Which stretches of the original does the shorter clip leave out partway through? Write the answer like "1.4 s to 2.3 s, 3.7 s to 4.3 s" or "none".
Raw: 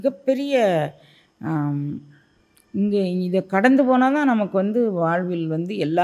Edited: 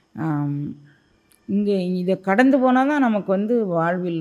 none